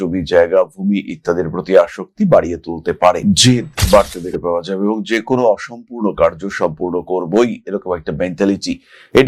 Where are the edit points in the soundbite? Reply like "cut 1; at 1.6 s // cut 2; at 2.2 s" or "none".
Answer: none